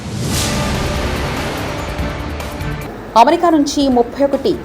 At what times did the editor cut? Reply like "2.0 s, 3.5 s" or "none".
2.8 s